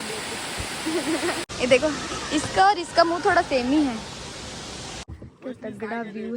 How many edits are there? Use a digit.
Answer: 2